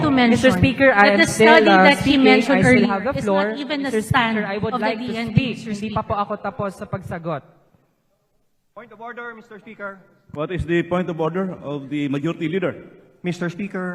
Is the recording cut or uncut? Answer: uncut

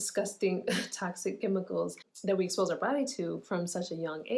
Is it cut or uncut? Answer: cut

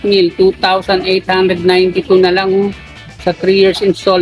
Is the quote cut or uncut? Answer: uncut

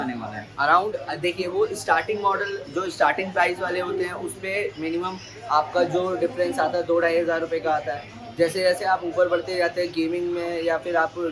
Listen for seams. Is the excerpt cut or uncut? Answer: uncut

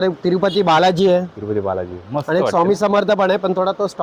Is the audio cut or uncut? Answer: uncut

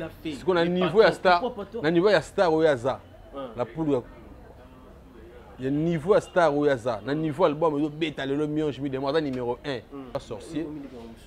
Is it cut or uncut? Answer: cut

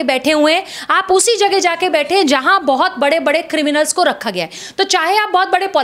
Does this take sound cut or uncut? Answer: uncut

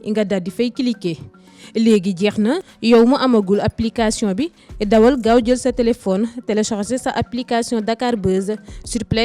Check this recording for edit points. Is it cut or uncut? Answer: cut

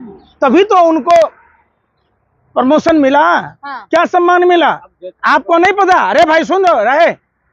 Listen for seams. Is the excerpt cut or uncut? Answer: uncut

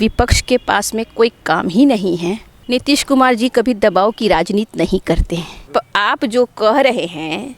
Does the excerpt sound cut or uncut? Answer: cut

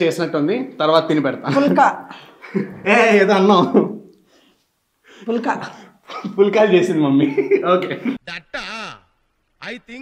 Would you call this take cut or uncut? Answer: uncut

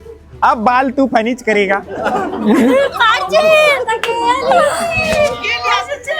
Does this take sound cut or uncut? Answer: uncut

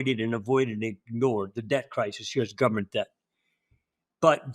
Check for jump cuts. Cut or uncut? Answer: uncut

